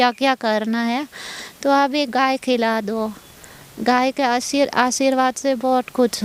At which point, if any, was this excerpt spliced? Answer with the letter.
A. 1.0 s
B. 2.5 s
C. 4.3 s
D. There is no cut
D